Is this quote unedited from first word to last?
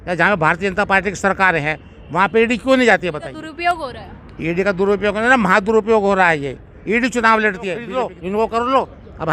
no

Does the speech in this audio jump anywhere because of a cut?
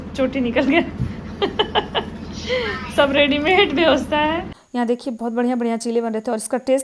yes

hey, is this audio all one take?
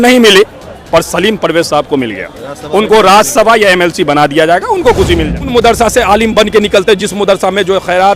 no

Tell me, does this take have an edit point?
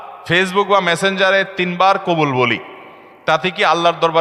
no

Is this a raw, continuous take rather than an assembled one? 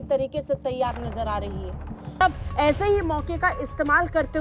no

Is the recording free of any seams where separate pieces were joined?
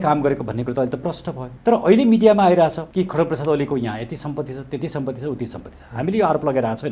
no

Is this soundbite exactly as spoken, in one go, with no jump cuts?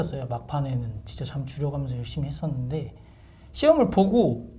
yes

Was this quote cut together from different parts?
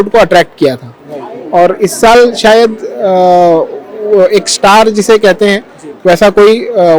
no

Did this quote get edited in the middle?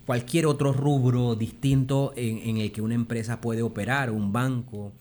no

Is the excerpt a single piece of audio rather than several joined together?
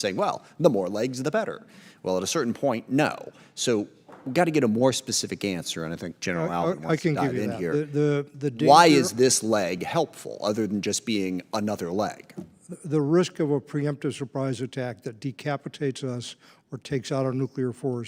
yes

